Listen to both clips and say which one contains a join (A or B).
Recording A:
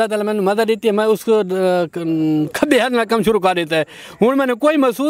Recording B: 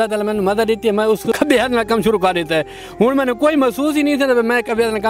B